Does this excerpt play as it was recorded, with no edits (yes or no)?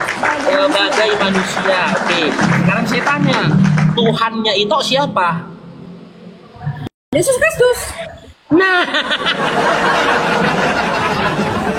yes